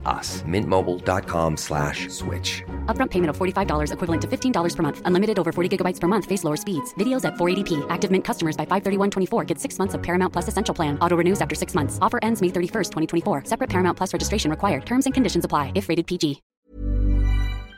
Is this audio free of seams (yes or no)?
no